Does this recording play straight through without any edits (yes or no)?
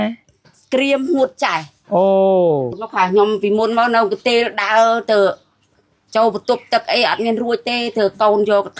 no